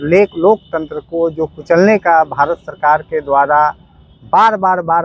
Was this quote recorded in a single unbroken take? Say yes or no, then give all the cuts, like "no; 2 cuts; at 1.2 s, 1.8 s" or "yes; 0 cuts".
yes; 0 cuts